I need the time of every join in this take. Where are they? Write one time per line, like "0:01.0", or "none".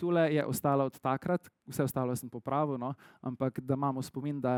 none